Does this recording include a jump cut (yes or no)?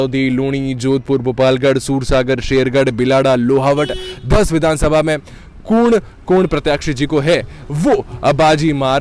no